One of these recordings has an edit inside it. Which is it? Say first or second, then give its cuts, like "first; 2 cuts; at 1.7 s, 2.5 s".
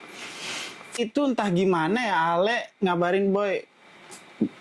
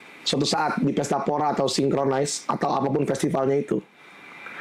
first; 1 cut; at 1.0 s